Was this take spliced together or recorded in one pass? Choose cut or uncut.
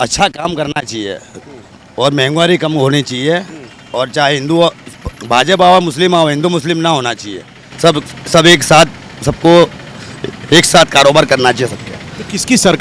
uncut